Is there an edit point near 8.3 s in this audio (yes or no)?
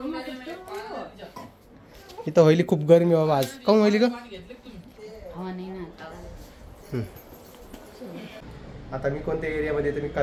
yes